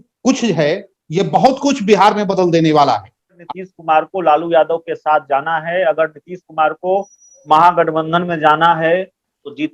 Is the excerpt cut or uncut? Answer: cut